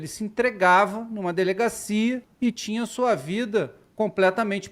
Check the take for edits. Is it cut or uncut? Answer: cut